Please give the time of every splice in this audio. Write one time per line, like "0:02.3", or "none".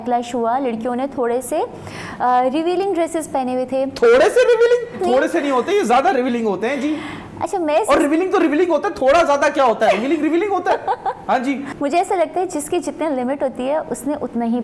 none